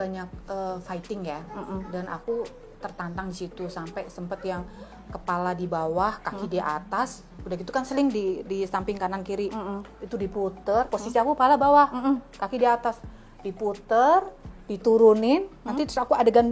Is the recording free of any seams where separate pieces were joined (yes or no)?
yes